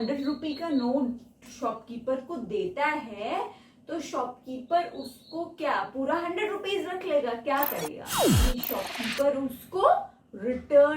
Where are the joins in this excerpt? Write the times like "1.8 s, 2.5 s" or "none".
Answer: 8.3 s